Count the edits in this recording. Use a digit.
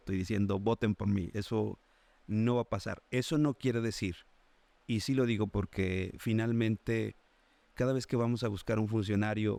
0